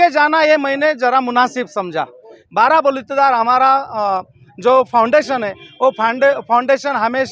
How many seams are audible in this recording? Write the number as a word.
one